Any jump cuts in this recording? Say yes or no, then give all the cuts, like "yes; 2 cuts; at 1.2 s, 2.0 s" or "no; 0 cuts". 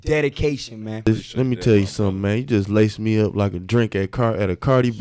yes; 1 cut; at 1.1 s